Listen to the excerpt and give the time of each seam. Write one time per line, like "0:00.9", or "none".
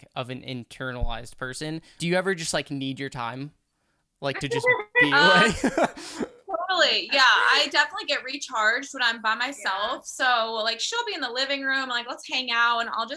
0:02.0